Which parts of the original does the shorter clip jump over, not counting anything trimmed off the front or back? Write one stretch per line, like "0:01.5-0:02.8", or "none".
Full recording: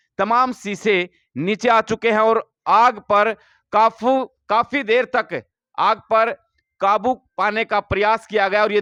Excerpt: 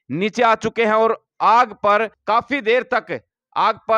0:03.4-0:04.4

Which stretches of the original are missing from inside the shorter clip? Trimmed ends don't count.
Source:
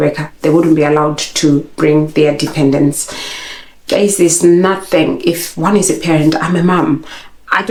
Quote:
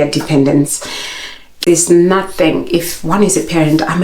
0:03.9-0:04.1

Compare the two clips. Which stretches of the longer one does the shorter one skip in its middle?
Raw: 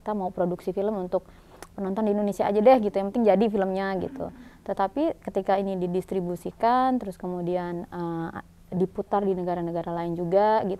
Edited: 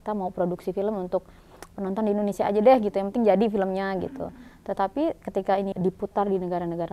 0:05.7-0:08.7

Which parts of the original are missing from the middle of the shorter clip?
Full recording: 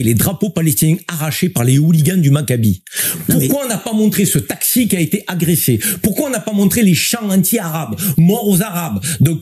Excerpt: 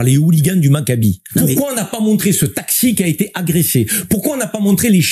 0:02.8-0:03.2

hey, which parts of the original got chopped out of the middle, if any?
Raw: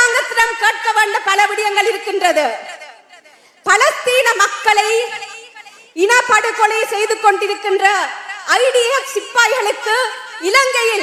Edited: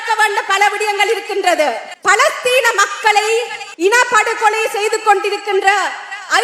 0:02.7-0:03.5
0:05.2-0:05.8

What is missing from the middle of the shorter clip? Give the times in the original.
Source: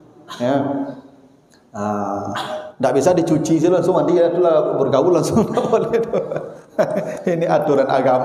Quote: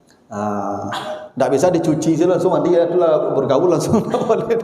none

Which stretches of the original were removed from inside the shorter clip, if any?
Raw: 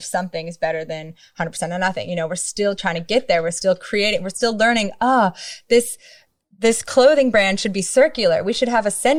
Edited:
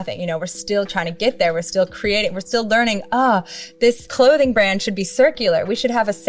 0:06.0-0:06.8

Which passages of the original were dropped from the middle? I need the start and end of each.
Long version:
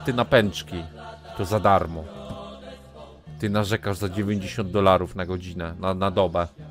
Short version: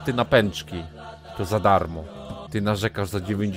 0:02.3-0:03.2

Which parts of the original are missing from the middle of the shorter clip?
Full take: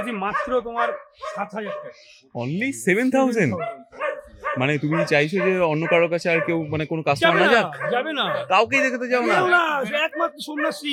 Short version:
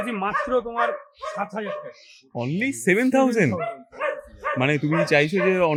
none

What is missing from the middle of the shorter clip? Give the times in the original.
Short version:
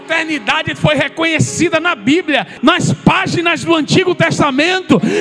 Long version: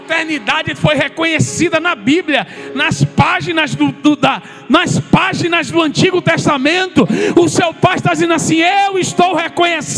0:02.5-0:04.6

